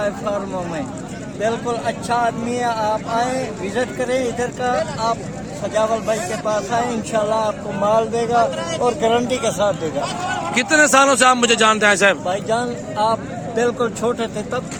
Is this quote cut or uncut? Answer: uncut